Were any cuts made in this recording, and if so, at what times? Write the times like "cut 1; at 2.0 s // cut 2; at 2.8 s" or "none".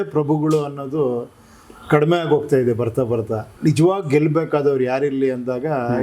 cut 1; at 3.4 s